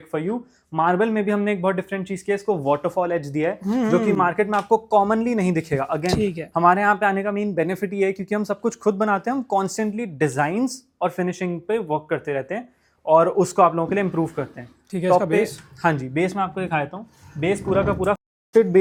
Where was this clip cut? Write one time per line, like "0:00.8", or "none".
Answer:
none